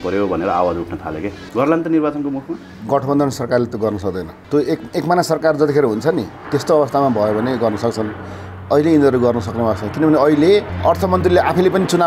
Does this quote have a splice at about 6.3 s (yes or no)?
yes